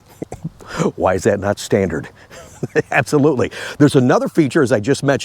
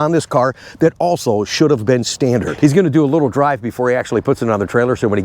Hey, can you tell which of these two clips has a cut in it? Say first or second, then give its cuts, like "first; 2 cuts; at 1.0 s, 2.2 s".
second; 1 cut; at 2.5 s